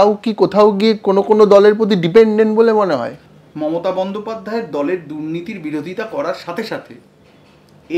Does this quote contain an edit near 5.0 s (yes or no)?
no